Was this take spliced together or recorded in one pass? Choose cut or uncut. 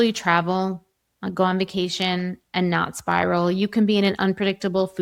uncut